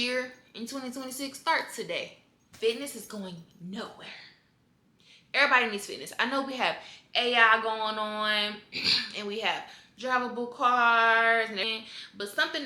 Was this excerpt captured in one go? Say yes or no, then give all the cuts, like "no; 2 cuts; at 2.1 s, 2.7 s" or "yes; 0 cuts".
no; 2 cuts; at 2.5 s, 11.6 s